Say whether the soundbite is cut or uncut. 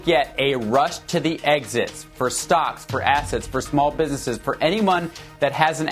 uncut